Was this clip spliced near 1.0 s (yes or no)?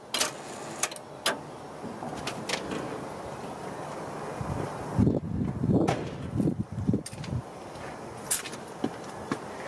no